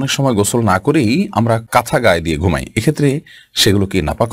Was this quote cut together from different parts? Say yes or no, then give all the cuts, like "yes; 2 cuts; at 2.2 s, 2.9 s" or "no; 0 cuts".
yes; 1 cut; at 1.6 s